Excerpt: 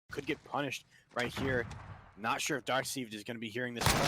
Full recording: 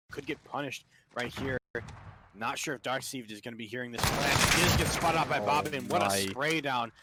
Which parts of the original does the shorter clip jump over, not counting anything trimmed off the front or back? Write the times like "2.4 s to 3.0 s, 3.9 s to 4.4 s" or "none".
1.6 s to 1.7 s